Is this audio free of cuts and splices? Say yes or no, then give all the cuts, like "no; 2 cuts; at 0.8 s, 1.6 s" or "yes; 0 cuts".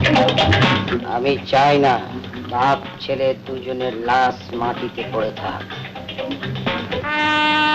no; 1 cut; at 2.3 s